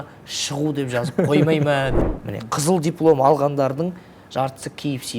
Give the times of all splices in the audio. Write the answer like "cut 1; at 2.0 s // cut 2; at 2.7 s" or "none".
cut 1; at 2.0 s